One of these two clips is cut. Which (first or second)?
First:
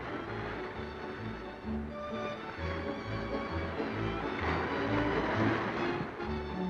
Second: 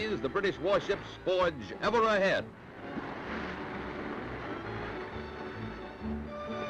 first